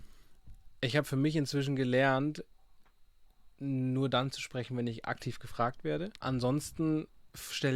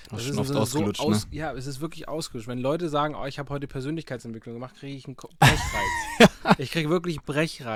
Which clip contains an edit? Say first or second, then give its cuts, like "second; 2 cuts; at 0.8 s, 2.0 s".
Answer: first; 1 cut; at 6.2 s